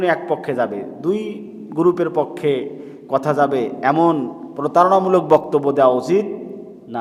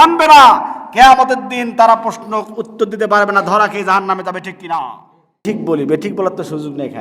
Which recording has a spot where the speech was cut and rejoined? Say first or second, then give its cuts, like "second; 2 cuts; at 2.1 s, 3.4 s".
second; 1 cut; at 5.5 s